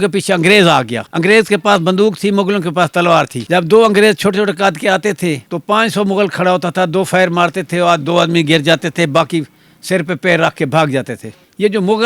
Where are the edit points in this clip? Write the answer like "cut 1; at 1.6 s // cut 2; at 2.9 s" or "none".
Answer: cut 1; at 1.0 s

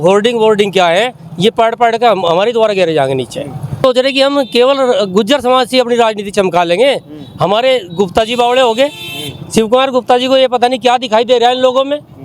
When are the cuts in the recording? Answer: none

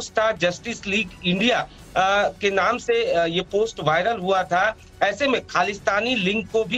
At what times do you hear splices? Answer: none

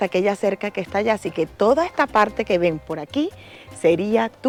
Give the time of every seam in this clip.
none

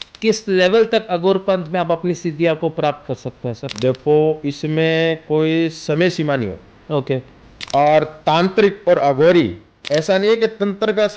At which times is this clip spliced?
cut 1; at 9.8 s

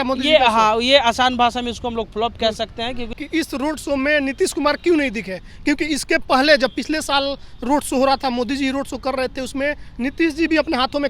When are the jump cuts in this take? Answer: cut 1; at 3.2 s

